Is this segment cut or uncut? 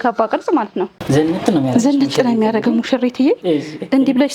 cut